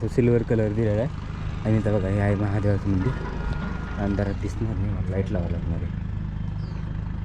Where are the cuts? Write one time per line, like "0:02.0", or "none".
none